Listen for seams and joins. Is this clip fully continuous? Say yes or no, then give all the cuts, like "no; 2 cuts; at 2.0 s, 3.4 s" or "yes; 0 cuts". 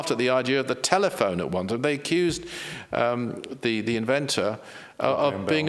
yes; 0 cuts